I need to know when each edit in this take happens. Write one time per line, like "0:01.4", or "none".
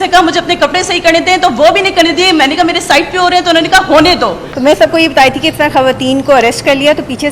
0:04.5